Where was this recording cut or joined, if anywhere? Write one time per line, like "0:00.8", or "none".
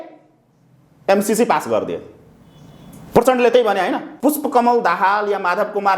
0:04.1